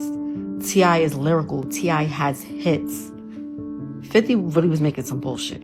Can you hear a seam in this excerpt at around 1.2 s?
no; 0 cuts

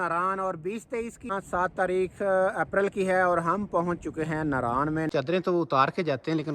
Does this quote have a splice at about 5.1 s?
yes; 2 cuts; at 1.3 s, 5.1 s

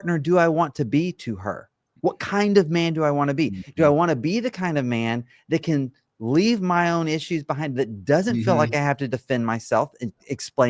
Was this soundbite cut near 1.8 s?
no; 0 cuts

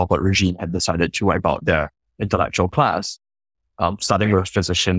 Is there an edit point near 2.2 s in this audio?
no; 1 cut; at 3.8 s

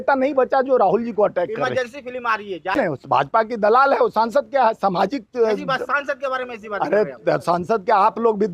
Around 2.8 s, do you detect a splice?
yes; 1 cut; at 2.8 s

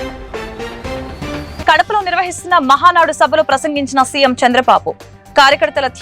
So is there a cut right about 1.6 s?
yes; 1 cut; at 1.6 s

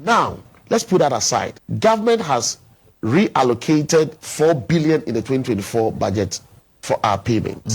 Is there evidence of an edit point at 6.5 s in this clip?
no; 2 cuts; at 1.6 s, 4.2 s

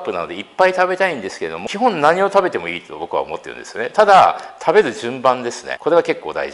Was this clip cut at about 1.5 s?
yes; 2 cuts; at 1.5 s, 5.6 s

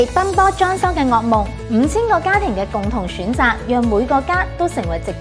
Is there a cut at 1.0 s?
no; 0 cuts

